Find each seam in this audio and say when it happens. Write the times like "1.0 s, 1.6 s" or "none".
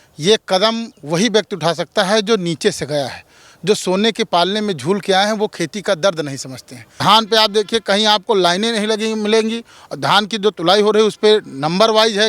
6.8 s